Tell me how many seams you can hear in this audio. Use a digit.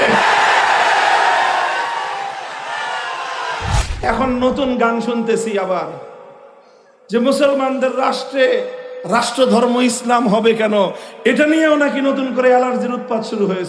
1